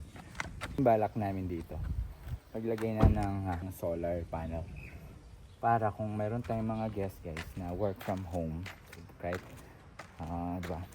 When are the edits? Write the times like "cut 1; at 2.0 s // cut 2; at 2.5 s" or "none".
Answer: cut 1; at 0.8 s // cut 2; at 3.6 s